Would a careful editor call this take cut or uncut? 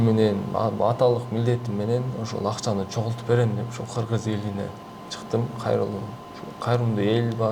uncut